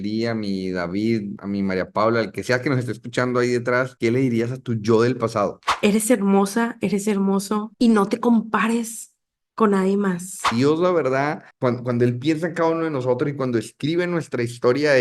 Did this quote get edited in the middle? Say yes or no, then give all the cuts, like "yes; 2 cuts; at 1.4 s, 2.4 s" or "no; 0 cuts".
yes; 4 cuts; at 1.4 s, 3.9 s, 5.7 s, 10.5 s